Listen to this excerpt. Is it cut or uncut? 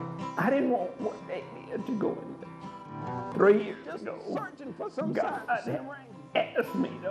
cut